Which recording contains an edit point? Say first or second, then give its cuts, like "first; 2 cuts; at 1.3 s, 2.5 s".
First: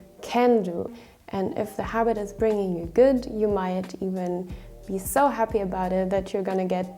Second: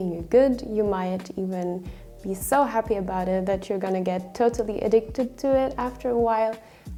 first; 1 cut; at 1.0 s